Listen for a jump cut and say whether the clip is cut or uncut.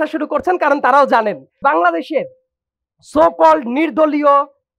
cut